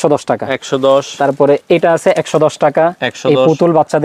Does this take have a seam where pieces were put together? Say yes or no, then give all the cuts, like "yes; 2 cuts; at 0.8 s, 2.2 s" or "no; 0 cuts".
no; 0 cuts